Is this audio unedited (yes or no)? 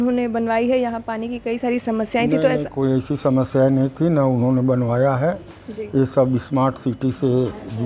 yes